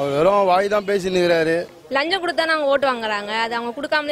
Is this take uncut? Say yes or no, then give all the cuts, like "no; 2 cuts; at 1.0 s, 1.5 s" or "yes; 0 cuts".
no; 1 cut; at 1.8 s